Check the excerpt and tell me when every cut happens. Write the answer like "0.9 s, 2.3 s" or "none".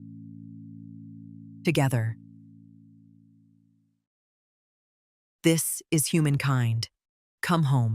1.3 s